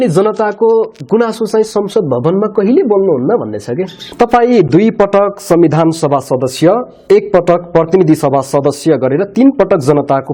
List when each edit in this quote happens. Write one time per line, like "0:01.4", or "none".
0:04.1

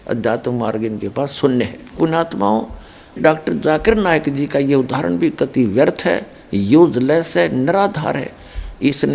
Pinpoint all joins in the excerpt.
0:02.0
0:03.2

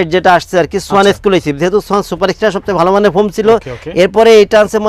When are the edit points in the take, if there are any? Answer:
none

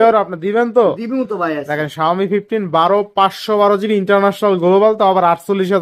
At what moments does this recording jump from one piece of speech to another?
none

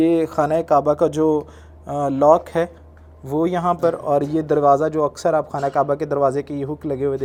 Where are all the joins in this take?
none

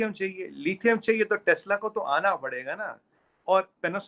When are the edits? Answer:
none

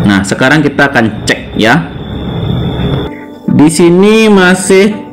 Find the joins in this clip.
0:03.1

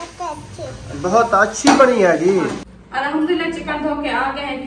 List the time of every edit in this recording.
0:02.7

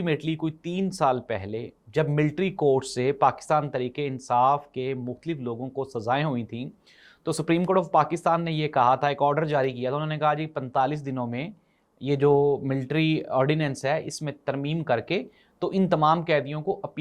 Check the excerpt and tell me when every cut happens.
none

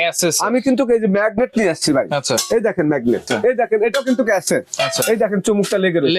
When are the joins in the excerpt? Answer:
0:03.3

